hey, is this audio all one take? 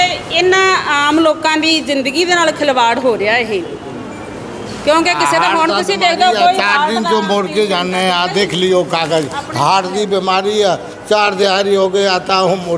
yes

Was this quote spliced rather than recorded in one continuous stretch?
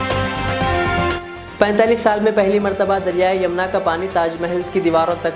yes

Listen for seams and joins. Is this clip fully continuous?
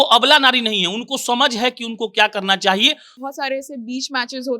no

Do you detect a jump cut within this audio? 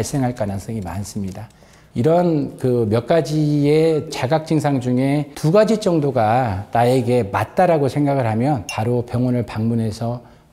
no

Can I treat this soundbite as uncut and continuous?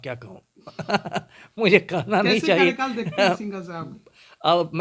yes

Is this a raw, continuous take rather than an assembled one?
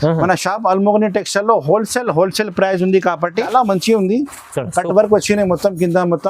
no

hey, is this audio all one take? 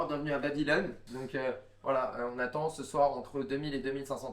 yes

